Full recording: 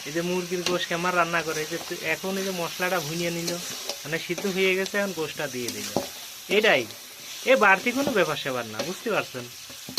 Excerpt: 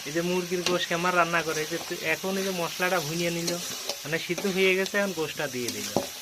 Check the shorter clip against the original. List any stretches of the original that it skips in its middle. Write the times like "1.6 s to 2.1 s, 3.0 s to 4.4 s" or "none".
none